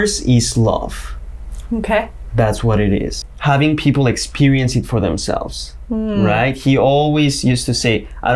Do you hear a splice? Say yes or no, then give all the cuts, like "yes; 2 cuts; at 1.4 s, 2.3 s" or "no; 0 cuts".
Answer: yes; 1 cut; at 3.2 s